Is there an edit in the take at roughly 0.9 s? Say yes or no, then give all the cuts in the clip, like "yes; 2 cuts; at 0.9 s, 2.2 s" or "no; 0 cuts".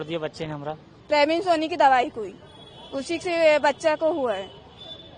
yes; 1 cut; at 0.9 s